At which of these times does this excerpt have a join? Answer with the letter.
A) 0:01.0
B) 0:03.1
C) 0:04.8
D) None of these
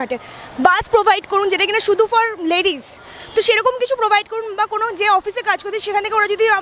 D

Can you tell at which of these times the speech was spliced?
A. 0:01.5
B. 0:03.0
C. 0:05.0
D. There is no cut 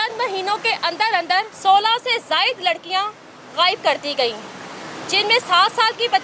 A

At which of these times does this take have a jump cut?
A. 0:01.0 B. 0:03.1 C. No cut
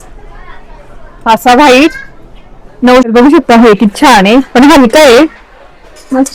B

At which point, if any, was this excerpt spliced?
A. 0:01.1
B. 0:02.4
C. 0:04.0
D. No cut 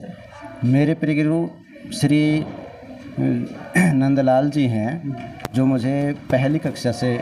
D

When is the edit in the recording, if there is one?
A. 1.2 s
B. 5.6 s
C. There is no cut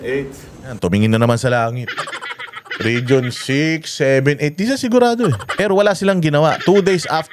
B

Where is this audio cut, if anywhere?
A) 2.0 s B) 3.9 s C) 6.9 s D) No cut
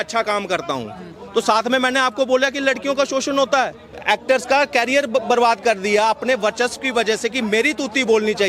B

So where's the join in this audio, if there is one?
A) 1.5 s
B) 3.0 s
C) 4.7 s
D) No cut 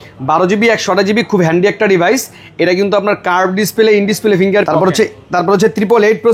C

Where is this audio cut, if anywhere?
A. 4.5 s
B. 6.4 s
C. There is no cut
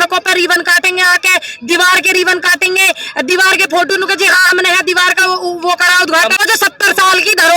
B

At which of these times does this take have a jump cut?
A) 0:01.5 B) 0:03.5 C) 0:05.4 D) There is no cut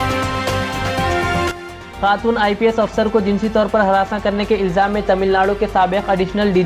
D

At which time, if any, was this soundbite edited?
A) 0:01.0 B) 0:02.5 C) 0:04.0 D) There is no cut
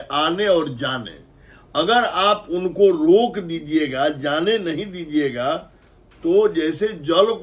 D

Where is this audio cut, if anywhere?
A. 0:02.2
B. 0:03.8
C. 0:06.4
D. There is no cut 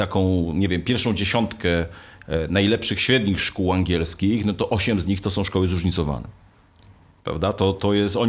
D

